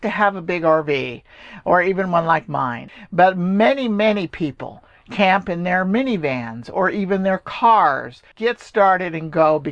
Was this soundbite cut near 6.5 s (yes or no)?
no